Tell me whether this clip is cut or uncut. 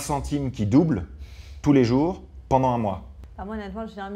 uncut